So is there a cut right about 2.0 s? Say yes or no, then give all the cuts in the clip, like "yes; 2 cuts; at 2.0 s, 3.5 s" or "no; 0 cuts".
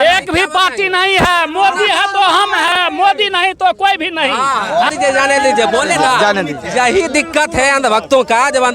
no; 1 cut; at 4.9 s